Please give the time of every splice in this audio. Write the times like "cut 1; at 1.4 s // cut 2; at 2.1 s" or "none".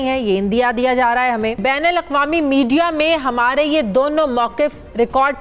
cut 1; at 1.6 s